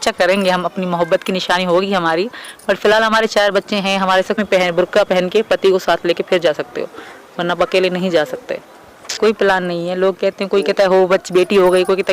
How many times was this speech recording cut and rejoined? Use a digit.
2